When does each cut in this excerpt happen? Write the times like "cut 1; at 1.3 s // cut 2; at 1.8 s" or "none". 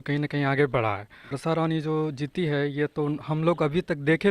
cut 1; at 1.3 s